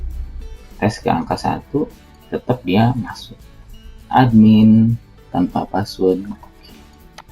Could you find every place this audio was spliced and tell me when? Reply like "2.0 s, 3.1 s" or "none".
4.0 s